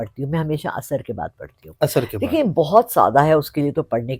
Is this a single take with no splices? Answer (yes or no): no